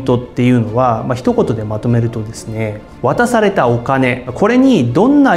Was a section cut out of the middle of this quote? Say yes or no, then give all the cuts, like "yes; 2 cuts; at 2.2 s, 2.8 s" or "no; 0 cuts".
yes; 1 cut; at 2.8 s